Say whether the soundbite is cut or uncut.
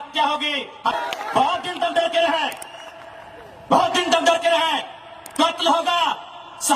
cut